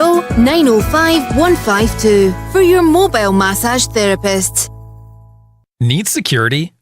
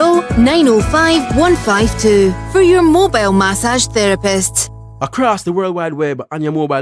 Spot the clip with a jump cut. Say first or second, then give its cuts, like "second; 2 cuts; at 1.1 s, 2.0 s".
first; 1 cut; at 5.1 s